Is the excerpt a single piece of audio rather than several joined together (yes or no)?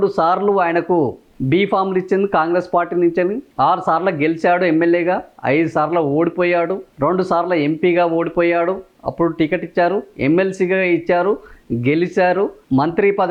yes